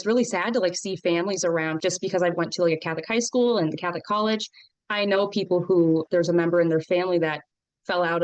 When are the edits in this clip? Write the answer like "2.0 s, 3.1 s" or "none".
1.8 s, 6.1 s